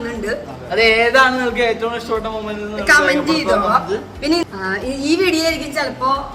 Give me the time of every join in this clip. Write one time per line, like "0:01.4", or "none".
0:04.4